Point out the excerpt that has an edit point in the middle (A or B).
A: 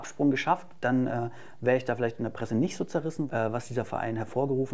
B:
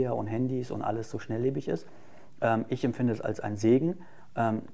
A